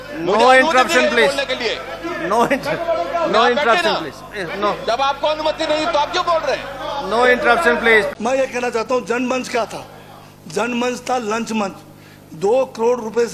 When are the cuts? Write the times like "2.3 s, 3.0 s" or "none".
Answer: 8.1 s